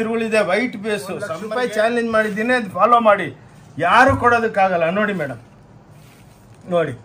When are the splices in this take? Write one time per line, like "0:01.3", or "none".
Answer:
0:01.2

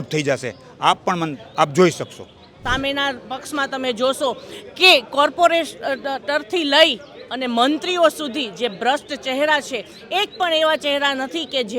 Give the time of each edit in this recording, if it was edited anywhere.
0:02.5

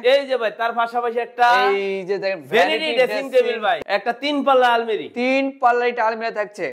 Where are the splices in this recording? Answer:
0:03.8

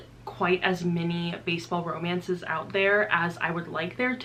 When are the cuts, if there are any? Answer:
none

